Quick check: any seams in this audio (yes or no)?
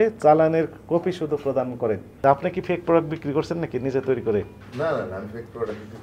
yes